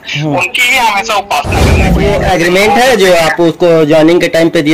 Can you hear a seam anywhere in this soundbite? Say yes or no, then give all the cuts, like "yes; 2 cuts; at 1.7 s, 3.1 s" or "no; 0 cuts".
yes; 1 cut; at 1.9 s